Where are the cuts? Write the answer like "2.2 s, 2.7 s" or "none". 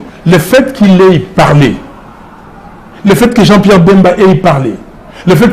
none

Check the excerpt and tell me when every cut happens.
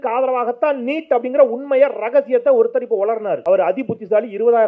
3.4 s

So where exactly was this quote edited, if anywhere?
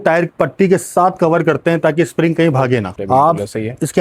3.0 s

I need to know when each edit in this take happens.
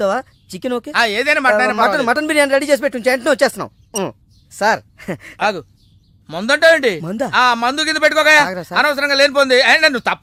none

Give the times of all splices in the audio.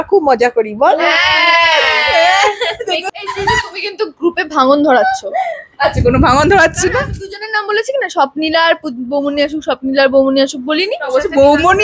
3.1 s

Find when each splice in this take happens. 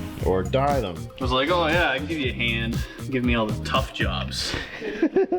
1.0 s

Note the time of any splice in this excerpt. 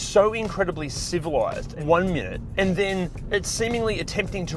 1.7 s, 2.4 s, 3.2 s

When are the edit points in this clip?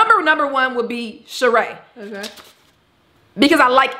none

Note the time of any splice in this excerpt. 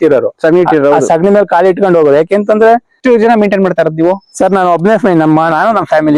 3.0 s

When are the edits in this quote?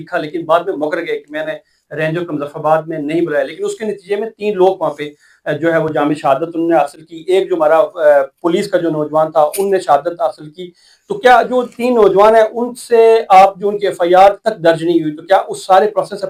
none

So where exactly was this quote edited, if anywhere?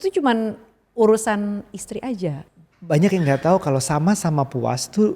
2.3 s

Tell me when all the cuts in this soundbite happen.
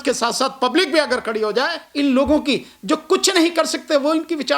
1.8 s

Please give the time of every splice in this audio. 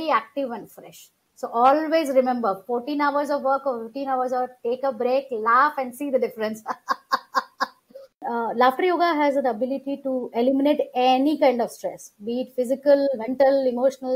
8.2 s

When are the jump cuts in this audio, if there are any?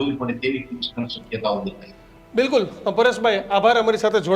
none

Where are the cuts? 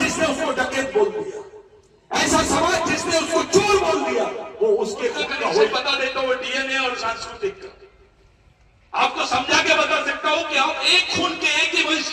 5.7 s

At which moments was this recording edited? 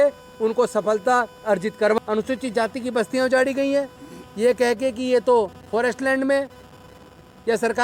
2.0 s

